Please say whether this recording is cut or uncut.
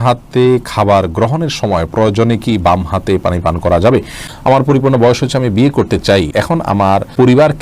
cut